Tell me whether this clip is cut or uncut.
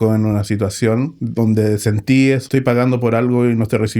cut